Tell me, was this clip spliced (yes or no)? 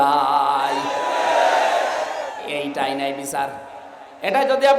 no